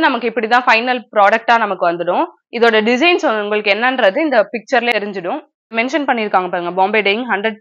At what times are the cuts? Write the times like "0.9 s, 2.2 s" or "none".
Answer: 5.7 s

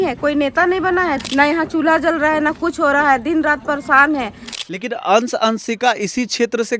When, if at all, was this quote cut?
1.2 s, 4.4 s

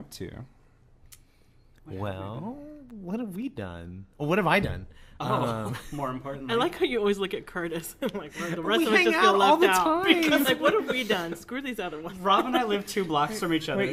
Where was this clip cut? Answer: none

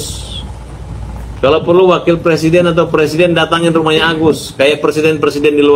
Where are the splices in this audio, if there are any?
none

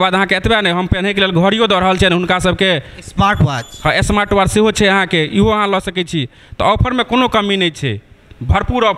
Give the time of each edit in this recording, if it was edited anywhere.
none

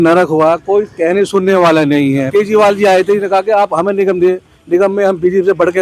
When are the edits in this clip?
2.3 s

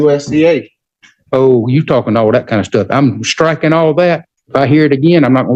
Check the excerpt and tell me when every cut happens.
4.3 s

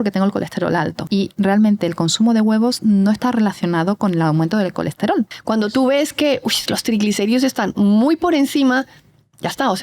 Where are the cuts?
1.0 s, 5.4 s

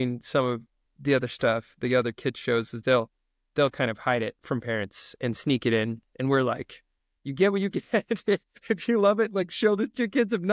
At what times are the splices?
none

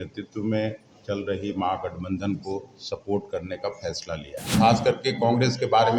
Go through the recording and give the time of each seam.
4.4 s

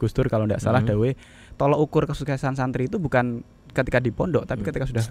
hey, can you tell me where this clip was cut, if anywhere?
none

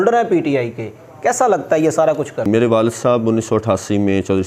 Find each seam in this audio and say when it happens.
2.5 s

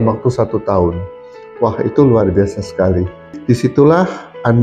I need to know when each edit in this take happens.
3.3 s

